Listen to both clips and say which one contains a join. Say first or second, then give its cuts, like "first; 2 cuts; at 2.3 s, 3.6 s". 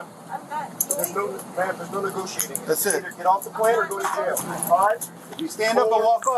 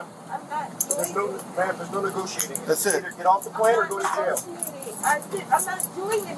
first; 1 cut; at 4.5 s